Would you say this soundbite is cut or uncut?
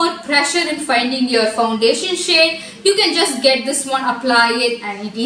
uncut